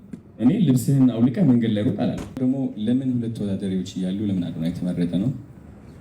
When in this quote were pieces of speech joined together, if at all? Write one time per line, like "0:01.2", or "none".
0:02.4

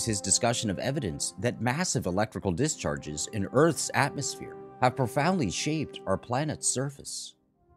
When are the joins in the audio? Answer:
0:03.6

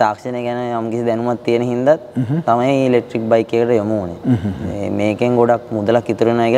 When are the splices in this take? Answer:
none

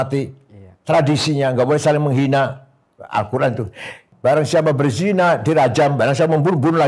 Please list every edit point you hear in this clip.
0:04.1

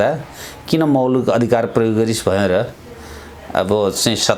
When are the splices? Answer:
none

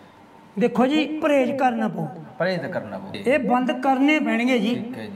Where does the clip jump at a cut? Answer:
0:03.1

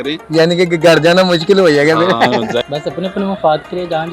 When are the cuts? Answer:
0:02.6

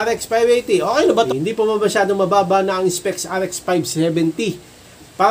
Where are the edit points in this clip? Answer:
0:01.3

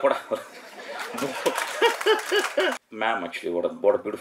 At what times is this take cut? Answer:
0:02.9

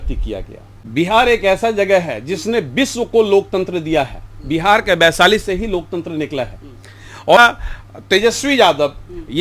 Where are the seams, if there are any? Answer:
0:00.9
0:07.4

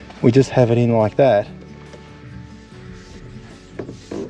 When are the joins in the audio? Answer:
0:01.5

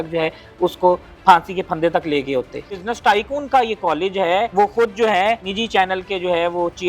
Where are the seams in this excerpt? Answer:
0:02.7
0:04.5
0:05.5

